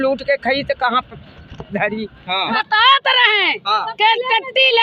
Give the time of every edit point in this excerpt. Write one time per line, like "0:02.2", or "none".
0:02.5